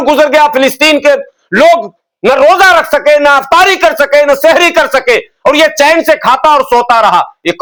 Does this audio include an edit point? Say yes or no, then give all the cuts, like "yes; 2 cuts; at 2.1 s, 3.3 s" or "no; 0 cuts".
no; 0 cuts